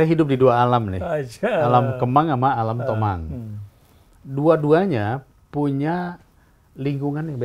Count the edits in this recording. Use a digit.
0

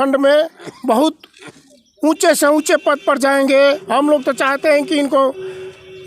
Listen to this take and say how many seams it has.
1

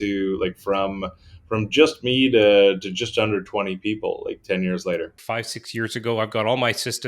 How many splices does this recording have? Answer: 1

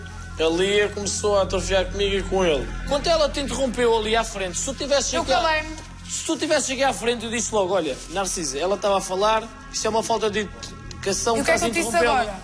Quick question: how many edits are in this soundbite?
1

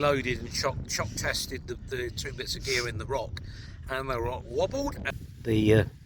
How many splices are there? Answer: 1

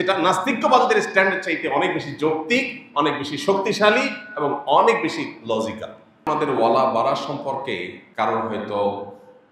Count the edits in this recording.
2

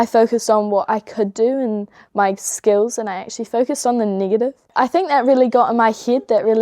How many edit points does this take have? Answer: 1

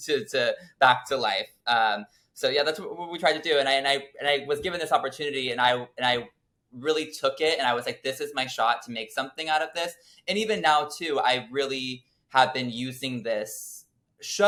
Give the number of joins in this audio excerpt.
0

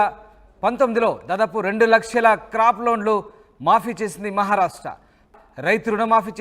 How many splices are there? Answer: 1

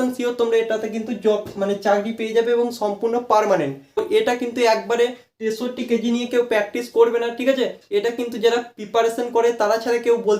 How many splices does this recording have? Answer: 1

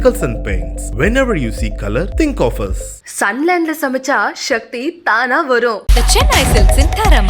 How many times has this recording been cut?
0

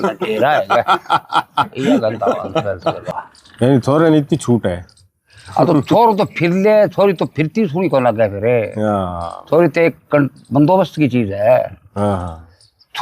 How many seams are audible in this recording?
2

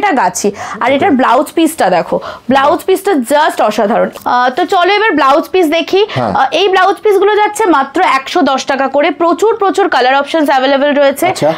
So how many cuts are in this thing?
1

